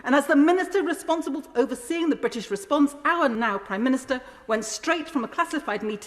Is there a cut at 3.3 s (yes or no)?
yes